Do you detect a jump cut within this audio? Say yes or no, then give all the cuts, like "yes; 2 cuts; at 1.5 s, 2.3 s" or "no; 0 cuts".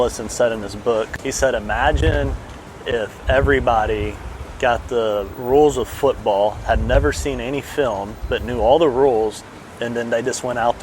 yes; 1 cut; at 1.1 s